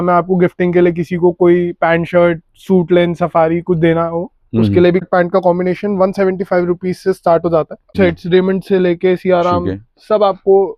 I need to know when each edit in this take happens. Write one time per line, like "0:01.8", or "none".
0:05.0
0:07.9